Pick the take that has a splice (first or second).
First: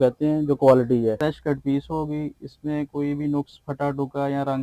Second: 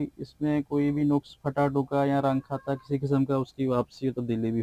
first